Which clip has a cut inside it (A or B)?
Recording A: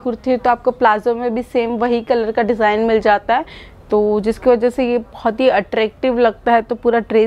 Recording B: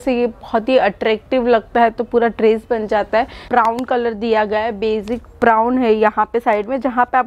B